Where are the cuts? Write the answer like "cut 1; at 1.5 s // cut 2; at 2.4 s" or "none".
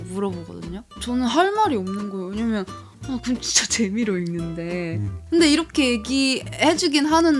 none